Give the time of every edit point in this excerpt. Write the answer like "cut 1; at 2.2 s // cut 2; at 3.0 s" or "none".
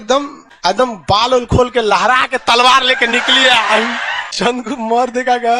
cut 1; at 4.7 s